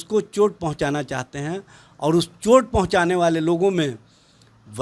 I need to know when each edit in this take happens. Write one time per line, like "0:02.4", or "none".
none